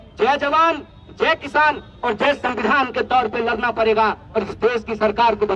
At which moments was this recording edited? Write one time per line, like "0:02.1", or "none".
none